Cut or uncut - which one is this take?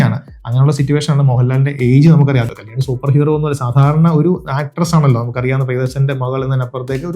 cut